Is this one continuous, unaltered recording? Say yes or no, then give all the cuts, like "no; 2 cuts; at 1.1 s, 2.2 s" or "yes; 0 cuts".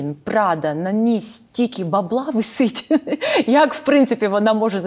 yes; 0 cuts